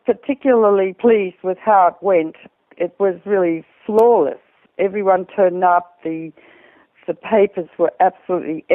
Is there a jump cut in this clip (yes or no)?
no